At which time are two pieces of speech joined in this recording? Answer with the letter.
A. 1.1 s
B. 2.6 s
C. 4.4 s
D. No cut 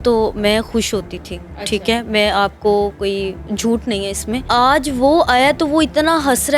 C